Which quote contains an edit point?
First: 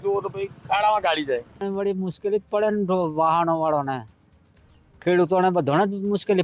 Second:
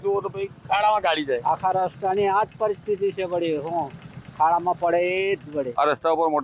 second; 2 cuts; at 1.4 s, 5.7 s

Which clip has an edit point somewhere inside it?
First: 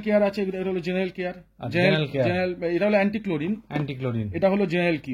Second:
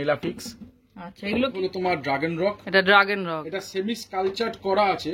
second; 1 cut; at 1.5 s

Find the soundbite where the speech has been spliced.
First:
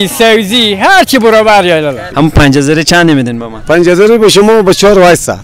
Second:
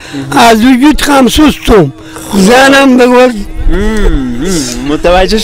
first; 1 cut; at 2.0 s

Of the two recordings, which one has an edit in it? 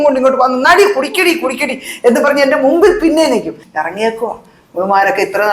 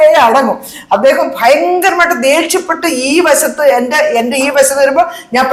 first; 1 cut; at 3.6 s

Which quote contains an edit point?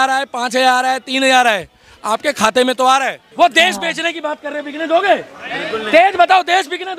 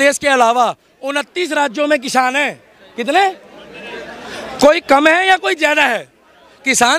first; 1 cut; at 3.2 s

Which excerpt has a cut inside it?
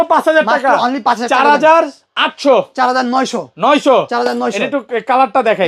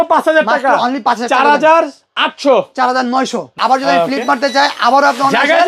second; 1 cut; at 3.5 s

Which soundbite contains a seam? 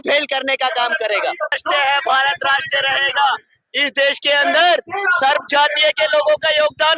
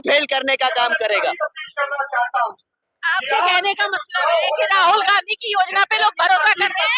first; 1 cut; at 1.6 s

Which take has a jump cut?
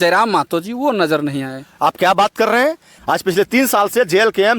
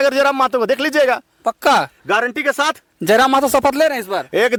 first; 1 cut; at 2.9 s

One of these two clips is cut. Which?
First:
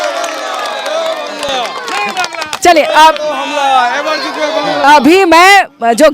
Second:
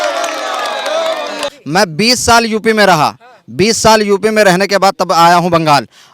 second; 1 cut; at 1.5 s

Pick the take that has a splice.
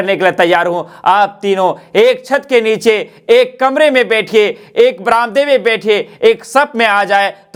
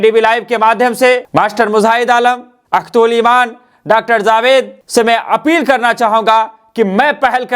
second; 1 cut; at 1.2 s

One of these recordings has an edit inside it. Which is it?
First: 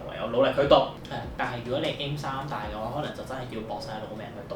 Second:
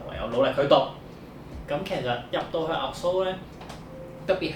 first; 1 cut; at 1.0 s

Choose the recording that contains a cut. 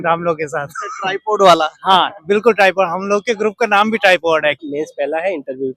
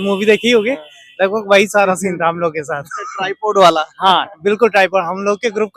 first; 1 cut; at 4.6 s

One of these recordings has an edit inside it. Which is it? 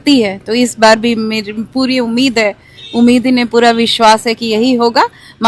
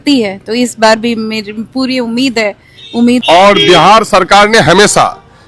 second; 1 cut; at 3.2 s

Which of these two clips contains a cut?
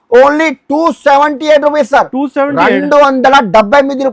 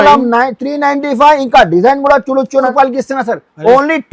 second; 1 cut; at 2.7 s

